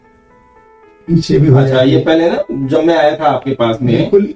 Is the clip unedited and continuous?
yes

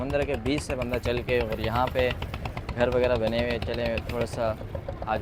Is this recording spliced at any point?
no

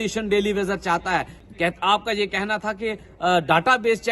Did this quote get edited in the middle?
yes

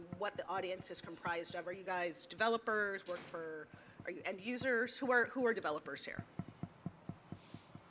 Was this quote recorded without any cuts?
yes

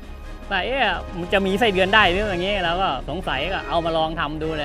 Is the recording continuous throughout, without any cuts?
no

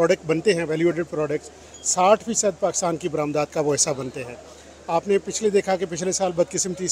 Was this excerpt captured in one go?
yes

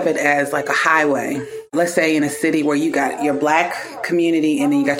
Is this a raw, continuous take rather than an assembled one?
no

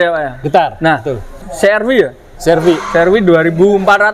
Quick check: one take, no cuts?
no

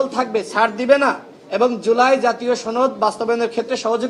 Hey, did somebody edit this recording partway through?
no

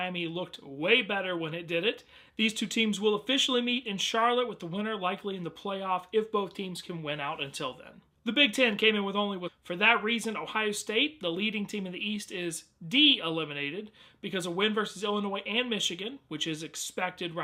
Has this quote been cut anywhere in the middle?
no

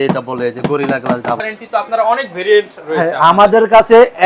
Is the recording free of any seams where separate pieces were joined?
no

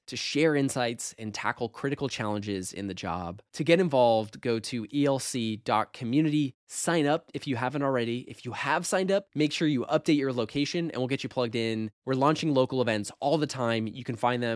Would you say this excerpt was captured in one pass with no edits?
yes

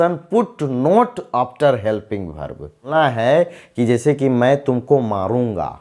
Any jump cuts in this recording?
yes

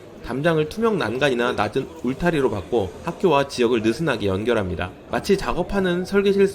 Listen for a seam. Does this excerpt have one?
yes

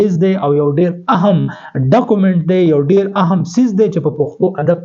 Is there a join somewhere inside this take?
no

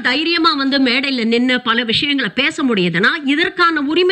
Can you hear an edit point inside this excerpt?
no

